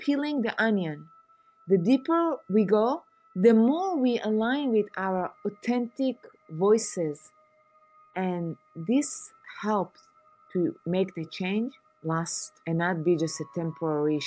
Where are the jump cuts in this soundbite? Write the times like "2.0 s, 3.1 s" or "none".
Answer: 12.4 s